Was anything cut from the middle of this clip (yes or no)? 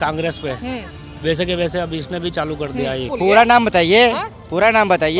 yes